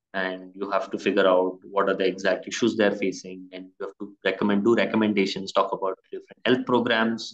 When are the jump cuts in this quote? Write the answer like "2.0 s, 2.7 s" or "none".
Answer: none